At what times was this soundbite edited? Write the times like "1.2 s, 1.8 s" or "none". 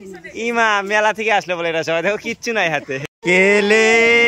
3.1 s